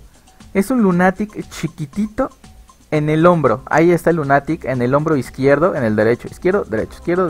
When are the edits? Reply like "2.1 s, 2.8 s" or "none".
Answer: 3.7 s